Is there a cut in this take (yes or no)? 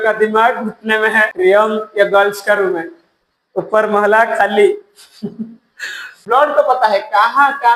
yes